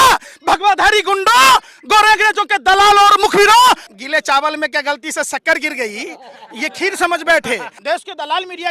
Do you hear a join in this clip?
yes; 2 cuts; at 3.9 s, 7.4 s

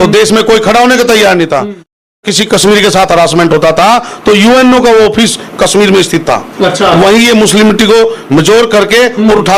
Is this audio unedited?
yes; 0 cuts

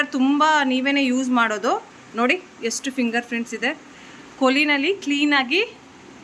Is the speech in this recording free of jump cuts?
yes; 0 cuts

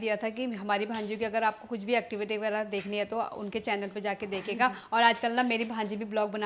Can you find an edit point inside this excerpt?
no; 0 cuts

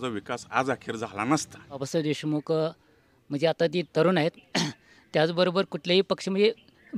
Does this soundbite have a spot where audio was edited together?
yes; 1 cut; at 1.8 s

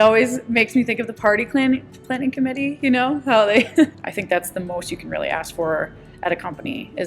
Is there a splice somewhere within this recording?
yes; 1 cut; at 4.1 s

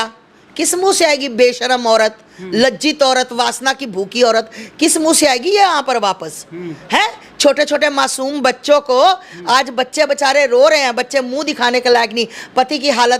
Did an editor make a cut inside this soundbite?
no; 0 cuts

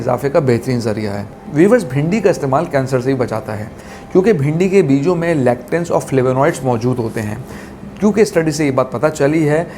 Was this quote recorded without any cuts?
no; 1 cut; at 1.2 s

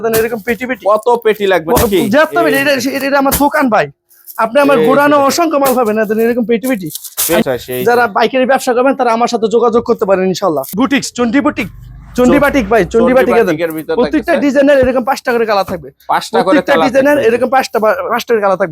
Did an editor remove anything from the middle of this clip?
yes; 2 cuts; at 7.4 s, 10.7 s

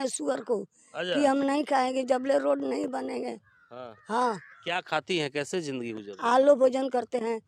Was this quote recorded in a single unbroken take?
yes; 0 cuts

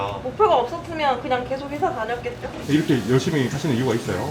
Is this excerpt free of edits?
no; 1 cut; at 2.6 s

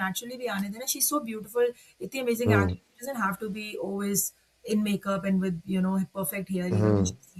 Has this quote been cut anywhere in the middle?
no; 0 cuts

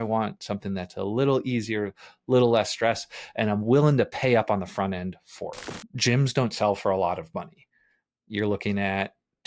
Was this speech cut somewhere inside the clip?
yes; 1 cut; at 5.7 s

